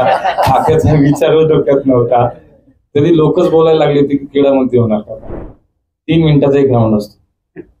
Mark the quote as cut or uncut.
cut